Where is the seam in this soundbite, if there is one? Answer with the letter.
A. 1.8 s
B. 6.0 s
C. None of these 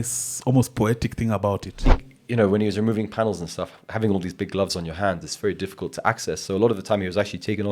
A